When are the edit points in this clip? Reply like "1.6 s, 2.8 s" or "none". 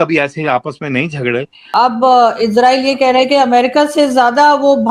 1.7 s